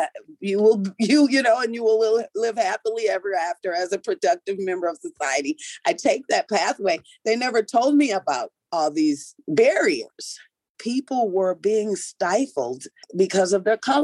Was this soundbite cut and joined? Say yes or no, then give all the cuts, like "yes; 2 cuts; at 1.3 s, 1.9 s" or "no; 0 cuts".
yes; 2 cuts; at 10.8 s, 13.1 s